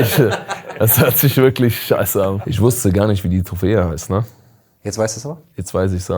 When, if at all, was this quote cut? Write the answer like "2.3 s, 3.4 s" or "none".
2.5 s